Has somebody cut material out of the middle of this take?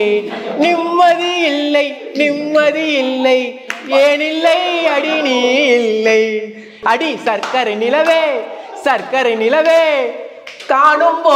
yes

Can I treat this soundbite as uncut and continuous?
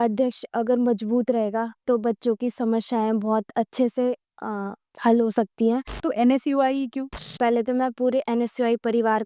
no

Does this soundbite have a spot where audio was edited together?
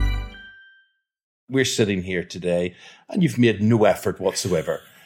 yes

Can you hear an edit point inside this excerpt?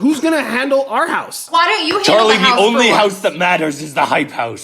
yes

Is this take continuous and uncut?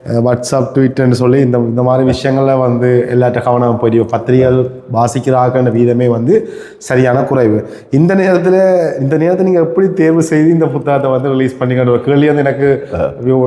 yes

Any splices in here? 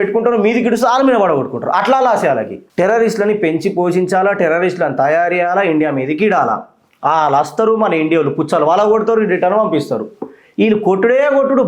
yes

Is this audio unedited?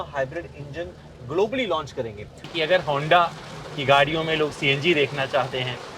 no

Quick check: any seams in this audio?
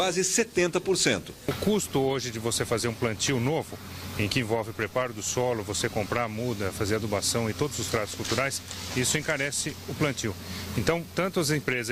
no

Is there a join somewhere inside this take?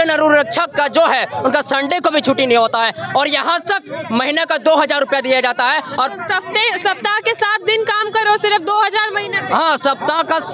no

